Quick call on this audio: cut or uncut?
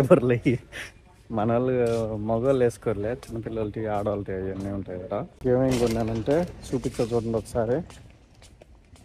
uncut